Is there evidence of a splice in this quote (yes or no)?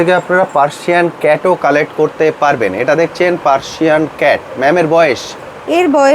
no